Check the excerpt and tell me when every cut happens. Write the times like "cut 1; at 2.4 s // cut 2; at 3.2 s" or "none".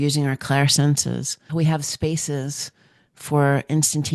cut 1; at 1.4 s